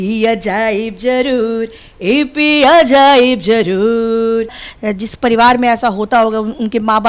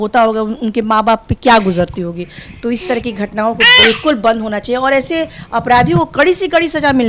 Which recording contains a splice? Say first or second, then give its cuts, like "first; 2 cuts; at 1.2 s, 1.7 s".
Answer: first; 1 cut; at 4.7 s